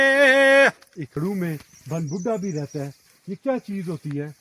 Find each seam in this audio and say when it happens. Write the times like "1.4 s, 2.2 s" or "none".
1.2 s